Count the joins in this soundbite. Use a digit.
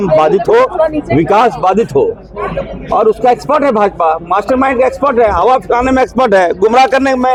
0